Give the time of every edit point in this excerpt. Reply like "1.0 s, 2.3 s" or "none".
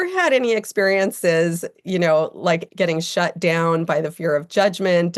2.6 s